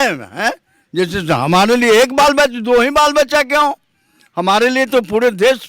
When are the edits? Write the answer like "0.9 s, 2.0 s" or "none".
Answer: none